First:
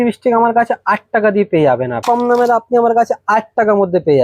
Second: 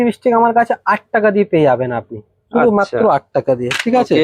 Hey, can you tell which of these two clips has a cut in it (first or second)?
first